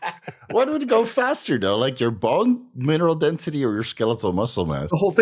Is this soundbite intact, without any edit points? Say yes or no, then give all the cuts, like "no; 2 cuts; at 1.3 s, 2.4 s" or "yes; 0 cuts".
yes; 0 cuts